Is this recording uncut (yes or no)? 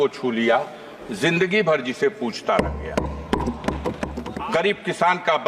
no